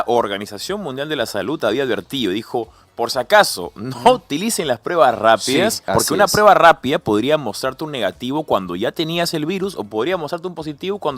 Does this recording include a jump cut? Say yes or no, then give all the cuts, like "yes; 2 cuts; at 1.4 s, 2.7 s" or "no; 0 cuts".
yes; 1 cut; at 5.8 s